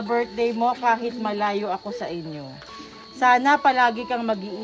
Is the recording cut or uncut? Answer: uncut